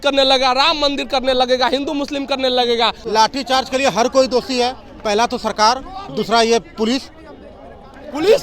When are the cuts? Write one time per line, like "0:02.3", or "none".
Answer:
0:03.0